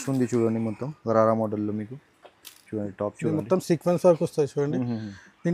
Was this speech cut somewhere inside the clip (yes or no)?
no